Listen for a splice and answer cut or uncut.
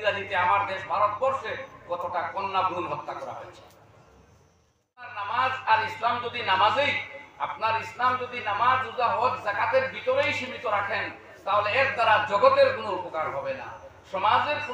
cut